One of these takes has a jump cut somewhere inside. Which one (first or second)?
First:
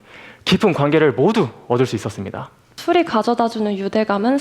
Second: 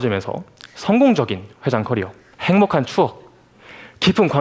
first